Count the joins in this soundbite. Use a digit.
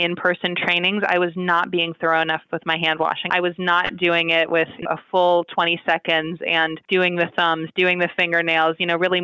3